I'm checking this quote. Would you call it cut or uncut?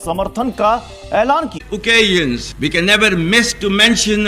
cut